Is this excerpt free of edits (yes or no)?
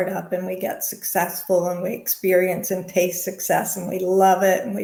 yes